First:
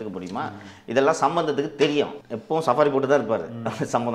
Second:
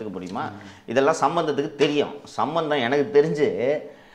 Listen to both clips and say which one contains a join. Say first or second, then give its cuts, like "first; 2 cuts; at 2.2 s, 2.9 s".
first; 1 cut; at 2.2 s